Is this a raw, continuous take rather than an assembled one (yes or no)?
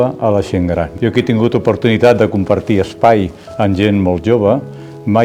no